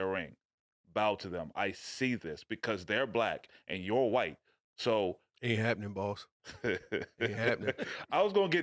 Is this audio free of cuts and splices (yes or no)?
yes